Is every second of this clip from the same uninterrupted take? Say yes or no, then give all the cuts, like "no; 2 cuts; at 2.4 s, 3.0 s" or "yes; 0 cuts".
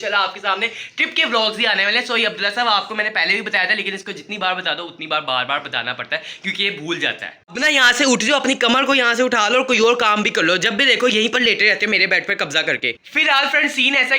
yes; 0 cuts